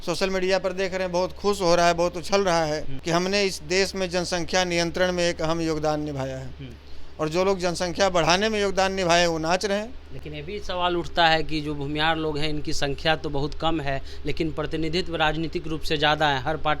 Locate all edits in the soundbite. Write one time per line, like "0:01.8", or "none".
0:02.9